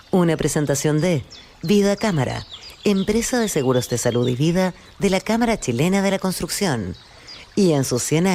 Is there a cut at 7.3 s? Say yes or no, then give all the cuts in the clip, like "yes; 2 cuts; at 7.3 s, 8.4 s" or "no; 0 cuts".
no; 0 cuts